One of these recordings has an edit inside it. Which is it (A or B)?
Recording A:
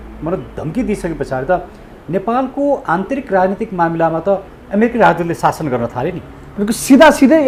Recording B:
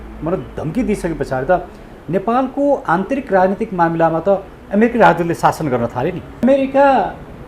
B